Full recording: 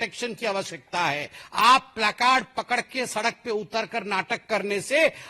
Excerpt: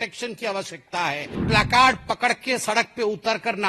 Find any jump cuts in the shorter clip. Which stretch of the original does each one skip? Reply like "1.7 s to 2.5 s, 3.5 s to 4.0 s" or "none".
1.4 s to 1.9 s